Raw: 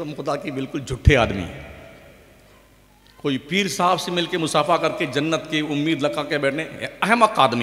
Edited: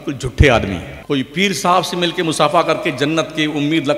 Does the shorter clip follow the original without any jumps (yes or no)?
no